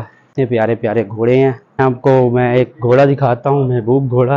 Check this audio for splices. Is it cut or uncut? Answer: cut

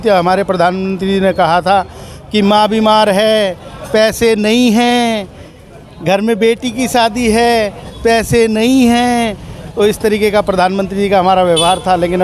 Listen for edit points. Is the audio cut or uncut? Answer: uncut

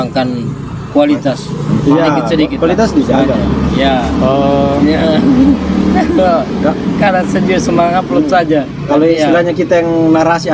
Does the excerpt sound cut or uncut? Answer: uncut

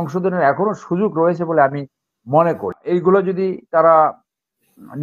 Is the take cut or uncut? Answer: cut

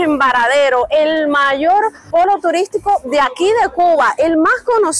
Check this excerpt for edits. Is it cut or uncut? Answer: uncut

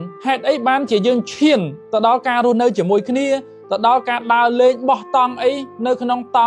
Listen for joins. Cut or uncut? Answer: uncut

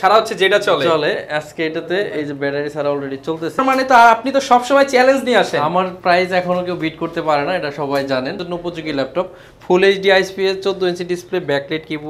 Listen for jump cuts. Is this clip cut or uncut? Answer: cut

